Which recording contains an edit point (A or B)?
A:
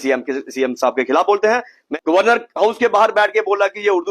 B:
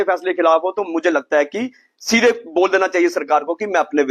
A